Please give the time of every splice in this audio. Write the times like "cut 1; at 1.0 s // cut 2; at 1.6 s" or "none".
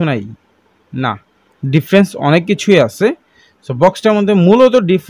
none